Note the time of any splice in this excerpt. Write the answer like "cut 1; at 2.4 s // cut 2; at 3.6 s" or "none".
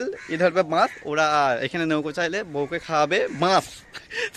none